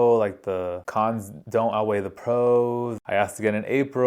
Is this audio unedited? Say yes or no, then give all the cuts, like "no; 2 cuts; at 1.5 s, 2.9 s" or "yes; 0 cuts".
no; 2 cuts; at 1.1 s, 3.0 s